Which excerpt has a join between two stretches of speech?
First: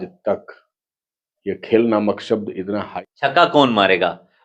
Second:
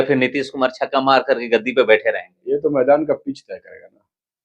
first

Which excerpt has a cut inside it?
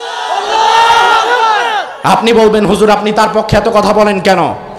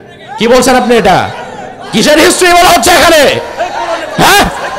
first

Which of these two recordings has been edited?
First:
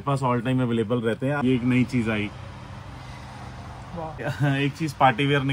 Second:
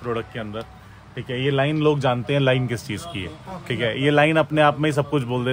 first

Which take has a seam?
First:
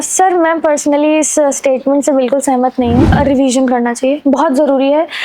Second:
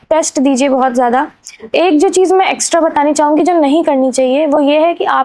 first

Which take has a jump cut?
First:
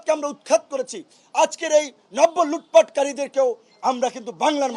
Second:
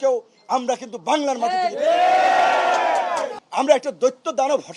second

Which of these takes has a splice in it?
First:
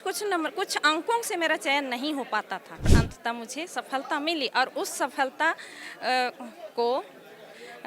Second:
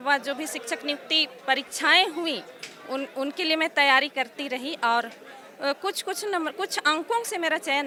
first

